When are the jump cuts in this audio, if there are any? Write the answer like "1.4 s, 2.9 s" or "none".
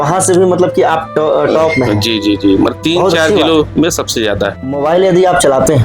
4.8 s